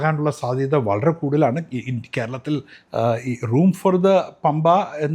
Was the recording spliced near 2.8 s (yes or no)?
yes